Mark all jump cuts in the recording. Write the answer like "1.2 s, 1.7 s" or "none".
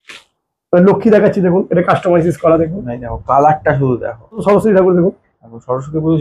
4.4 s